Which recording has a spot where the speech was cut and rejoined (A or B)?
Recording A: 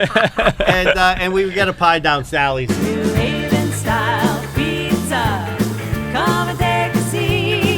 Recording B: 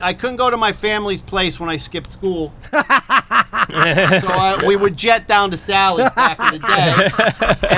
A